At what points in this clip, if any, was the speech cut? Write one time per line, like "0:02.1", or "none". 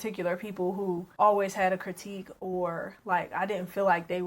0:01.1